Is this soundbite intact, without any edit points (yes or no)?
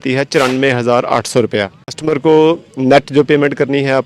no